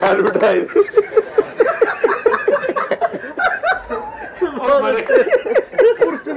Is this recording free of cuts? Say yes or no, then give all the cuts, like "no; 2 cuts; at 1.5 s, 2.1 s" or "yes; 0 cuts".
yes; 0 cuts